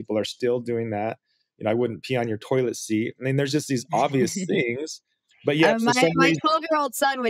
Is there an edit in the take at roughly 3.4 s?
no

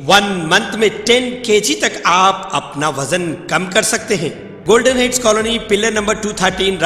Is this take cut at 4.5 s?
yes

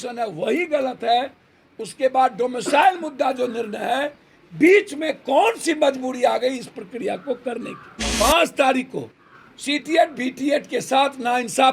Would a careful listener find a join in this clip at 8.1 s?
yes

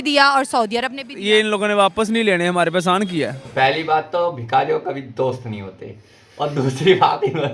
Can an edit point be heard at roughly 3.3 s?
no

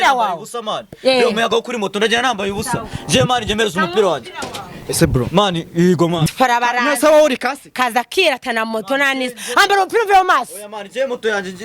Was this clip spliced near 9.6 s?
no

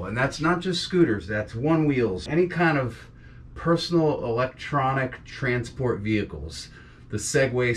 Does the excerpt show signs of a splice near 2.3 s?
yes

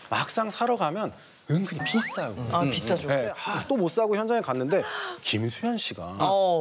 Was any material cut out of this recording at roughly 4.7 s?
no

